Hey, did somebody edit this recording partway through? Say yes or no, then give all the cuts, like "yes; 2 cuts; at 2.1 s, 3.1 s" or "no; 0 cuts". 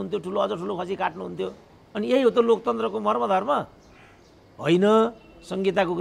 no; 0 cuts